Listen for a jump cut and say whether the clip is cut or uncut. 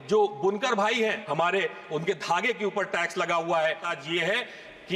cut